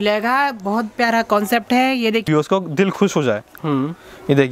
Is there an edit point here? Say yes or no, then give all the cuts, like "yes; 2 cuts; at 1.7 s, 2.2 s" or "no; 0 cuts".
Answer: yes; 1 cut; at 2.2 s